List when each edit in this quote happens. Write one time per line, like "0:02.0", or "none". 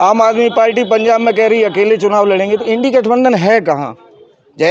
none